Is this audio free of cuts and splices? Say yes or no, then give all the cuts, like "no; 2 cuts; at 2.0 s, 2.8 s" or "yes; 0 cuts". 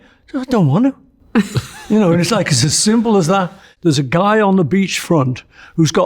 no; 1 cut; at 3.7 s